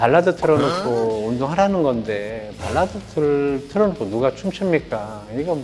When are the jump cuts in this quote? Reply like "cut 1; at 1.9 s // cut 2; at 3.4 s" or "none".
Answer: none